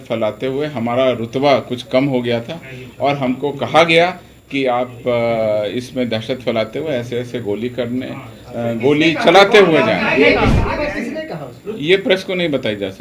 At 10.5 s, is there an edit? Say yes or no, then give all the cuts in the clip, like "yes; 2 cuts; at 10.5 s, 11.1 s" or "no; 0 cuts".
yes; 1 cut; at 10.5 s